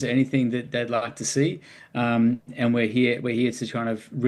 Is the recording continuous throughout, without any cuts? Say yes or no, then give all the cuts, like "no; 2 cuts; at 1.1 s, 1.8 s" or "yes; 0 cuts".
yes; 0 cuts